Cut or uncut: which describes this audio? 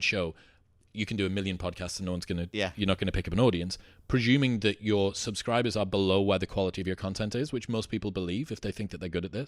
uncut